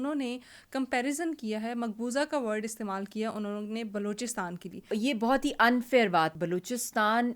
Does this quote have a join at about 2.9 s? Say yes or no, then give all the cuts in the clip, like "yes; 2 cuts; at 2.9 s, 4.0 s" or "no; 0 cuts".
no; 2 cuts; at 4.9 s, 6.3 s